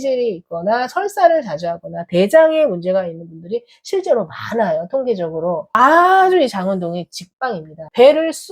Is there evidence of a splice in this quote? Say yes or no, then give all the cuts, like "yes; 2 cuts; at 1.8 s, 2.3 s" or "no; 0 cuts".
no; 0 cuts